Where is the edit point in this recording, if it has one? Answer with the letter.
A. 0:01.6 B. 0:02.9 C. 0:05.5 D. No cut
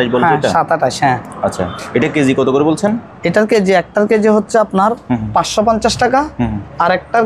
D